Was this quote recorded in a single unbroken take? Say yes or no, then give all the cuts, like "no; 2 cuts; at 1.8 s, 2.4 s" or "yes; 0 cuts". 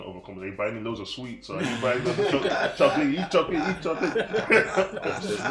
yes; 0 cuts